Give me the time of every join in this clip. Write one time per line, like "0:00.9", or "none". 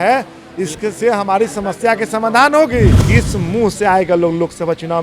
0:03.0